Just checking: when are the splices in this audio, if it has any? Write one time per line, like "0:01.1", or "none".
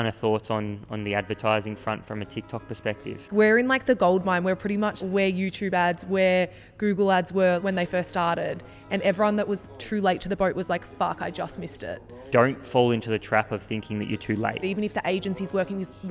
0:03.3
0:05.0
0:07.6
0:12.2
0:14.6